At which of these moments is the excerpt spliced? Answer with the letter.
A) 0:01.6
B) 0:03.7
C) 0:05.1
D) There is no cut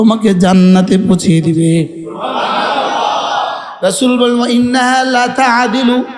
D